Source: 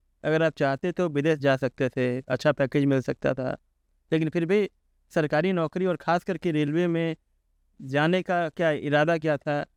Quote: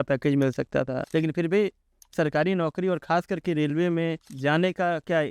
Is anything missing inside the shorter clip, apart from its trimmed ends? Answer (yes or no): yes